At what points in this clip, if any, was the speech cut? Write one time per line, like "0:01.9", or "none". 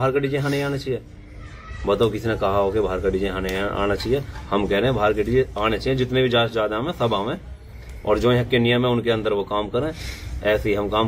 none